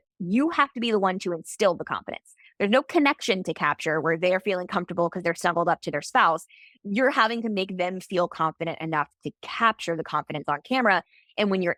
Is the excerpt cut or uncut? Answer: uncut